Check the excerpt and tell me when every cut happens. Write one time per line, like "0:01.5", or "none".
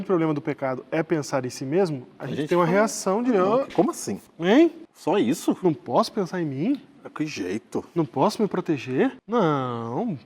0:04.9
0:09.2